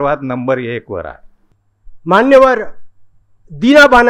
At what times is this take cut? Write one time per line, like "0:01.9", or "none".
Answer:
0:01.6